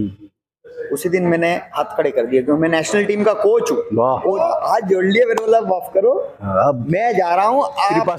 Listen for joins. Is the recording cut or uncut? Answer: cut